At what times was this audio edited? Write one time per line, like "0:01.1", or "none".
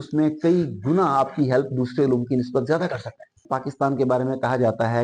0:03.4